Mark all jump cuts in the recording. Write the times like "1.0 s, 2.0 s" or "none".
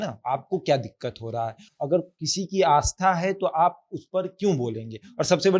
none